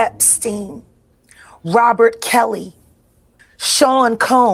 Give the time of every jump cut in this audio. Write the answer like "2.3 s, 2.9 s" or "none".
none